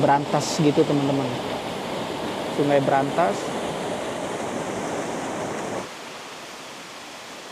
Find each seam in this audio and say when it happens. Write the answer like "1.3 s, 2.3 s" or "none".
5.8 s